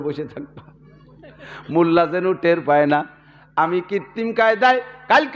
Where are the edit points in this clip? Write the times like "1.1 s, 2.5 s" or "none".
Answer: none